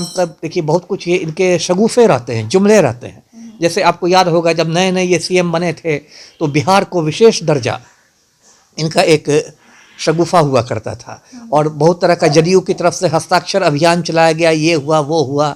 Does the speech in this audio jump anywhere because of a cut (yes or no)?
no